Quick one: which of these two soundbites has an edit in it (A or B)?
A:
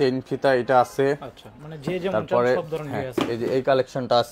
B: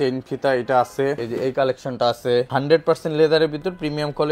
B